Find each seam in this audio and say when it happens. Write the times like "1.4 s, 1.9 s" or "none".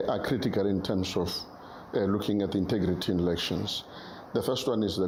none